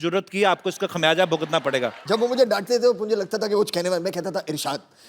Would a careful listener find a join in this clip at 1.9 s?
yes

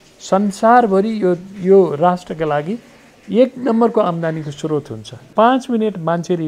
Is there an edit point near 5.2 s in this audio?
yes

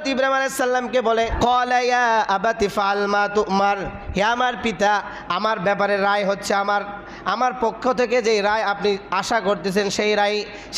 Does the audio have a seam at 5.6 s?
no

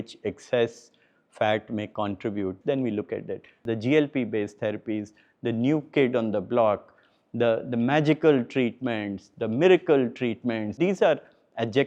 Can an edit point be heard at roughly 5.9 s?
no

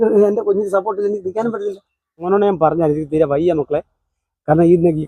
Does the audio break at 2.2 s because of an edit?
yes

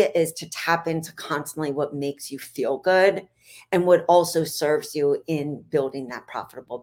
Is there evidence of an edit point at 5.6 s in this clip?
no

